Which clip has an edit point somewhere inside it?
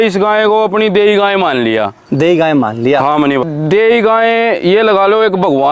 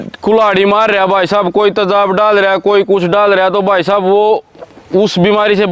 first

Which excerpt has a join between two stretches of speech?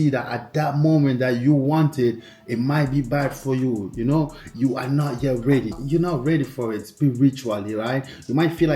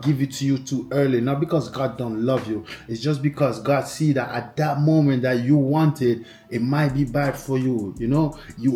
first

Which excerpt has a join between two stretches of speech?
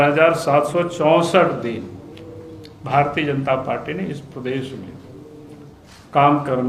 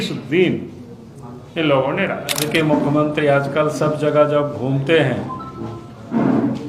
second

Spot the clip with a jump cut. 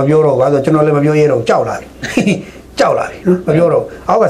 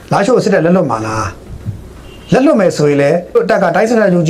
second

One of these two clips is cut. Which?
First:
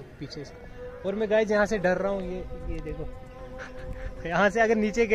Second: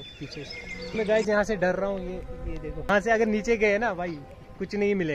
second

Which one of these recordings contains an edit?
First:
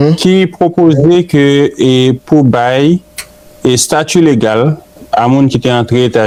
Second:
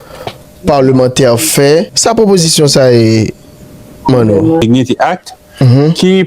second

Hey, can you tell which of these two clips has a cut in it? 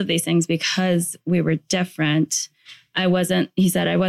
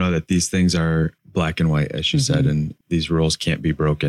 second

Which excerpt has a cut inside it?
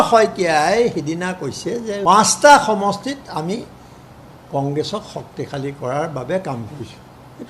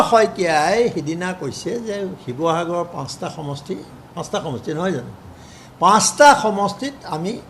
first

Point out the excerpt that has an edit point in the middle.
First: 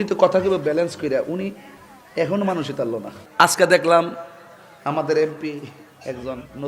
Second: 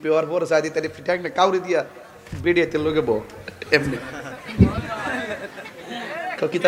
first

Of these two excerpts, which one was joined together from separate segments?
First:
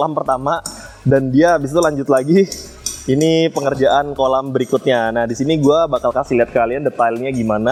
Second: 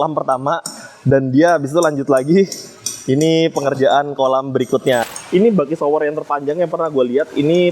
second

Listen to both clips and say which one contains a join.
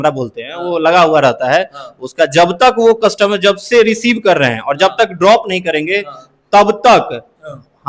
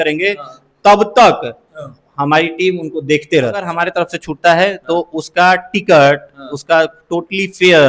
second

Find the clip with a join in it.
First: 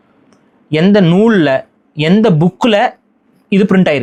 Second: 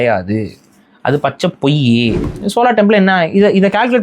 second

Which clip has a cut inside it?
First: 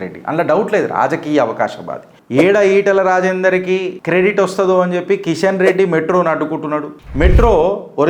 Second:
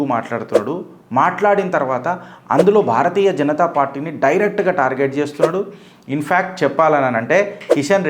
first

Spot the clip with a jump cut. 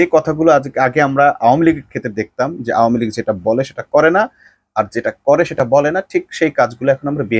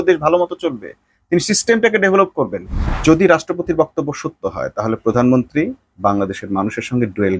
second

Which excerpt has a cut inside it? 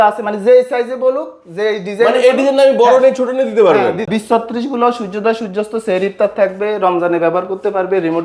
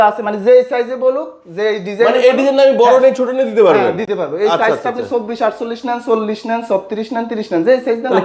first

